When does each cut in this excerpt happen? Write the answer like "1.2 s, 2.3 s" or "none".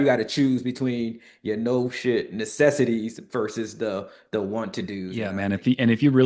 5.3 s